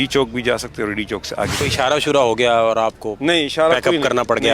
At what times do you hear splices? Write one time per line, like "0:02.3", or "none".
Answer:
0:01.6

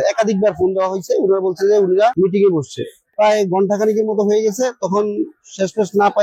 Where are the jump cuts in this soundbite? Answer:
0:02.7

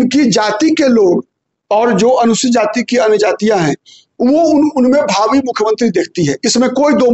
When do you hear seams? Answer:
none

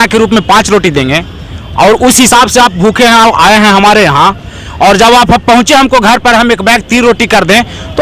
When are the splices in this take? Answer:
none

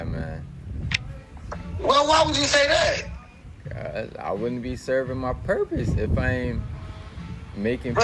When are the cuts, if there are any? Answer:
none

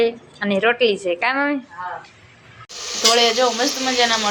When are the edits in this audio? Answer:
0:02.8

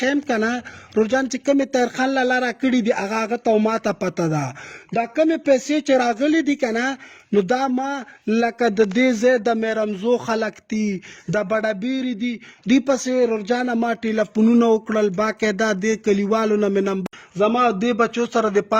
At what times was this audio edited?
0:17.1

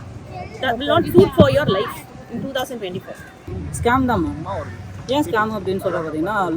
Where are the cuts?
0:03.8

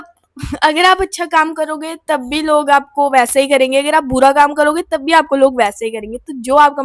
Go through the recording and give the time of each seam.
none

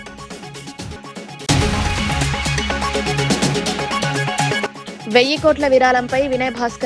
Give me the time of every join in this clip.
0:01.5
0:04.2

